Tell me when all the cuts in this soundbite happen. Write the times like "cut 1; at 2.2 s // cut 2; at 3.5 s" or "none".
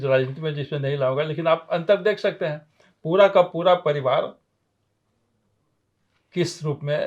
none